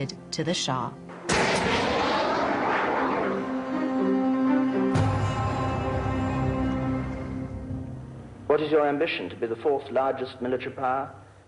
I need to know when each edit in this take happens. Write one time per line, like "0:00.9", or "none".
0:07.3